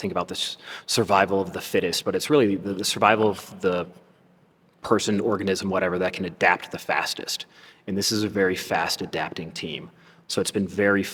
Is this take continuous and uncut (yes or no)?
yes